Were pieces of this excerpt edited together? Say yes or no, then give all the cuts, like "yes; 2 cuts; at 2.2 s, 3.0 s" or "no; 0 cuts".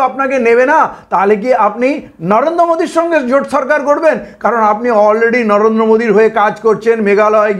no; 0 cuts